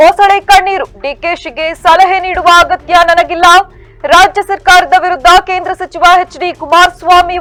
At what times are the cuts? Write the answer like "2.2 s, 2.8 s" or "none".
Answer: none